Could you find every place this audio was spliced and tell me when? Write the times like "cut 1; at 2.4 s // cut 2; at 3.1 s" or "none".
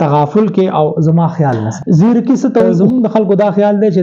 cut 1; at 1.7 s // cut 2; at 2.7 s